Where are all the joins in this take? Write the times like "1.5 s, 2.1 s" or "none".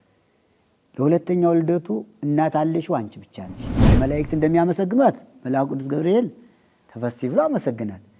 3.9 s